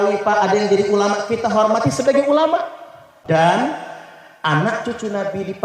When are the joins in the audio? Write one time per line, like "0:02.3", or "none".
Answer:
0:03.1

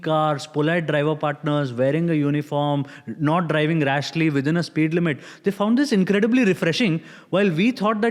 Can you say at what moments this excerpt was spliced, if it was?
none

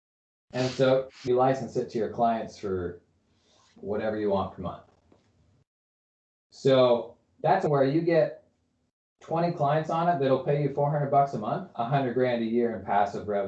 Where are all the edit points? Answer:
0:01.2
0:07.7
0:11.6

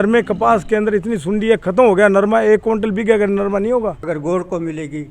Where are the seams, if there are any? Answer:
0:04.1

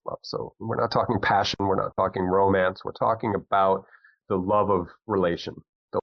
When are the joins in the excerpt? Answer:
0:04.2

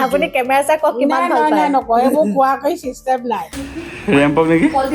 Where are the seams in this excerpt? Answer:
0:03.6

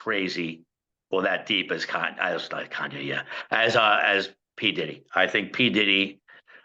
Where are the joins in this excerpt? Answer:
none

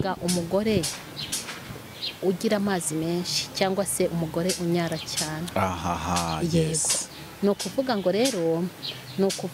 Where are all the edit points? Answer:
none

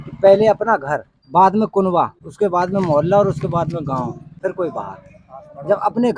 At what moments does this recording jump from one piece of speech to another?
0:01.1
0:02.2
0:04.3

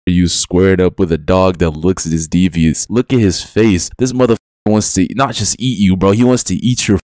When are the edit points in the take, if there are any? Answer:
none

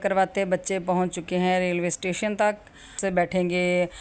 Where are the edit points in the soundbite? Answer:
0:03.0

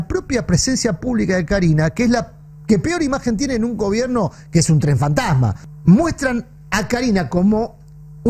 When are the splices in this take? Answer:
0:05.6

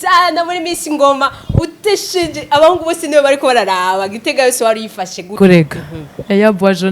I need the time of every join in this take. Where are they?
0:05.4

